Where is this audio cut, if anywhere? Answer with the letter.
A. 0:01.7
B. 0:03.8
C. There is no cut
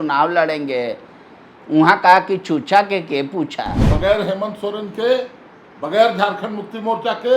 B